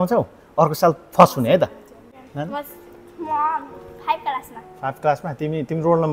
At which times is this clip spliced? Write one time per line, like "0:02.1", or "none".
none